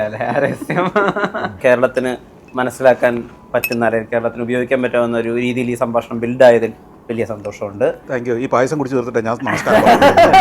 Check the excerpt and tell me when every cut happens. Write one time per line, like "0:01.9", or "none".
0:01.6